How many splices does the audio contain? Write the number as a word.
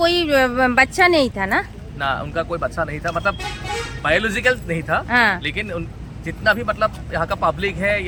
zero